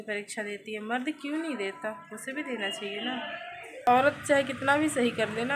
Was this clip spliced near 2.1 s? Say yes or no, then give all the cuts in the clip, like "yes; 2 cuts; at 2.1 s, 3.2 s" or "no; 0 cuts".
no; 1 cut; at 3.8 s